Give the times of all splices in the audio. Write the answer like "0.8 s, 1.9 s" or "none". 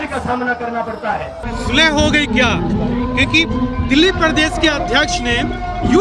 1.3 s